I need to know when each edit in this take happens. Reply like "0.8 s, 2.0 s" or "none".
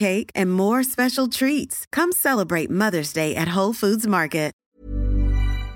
4.6 s